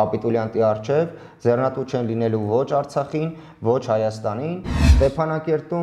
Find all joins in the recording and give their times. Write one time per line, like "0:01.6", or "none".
0:04.8